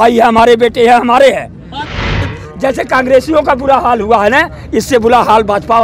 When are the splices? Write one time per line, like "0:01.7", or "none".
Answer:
0:01.9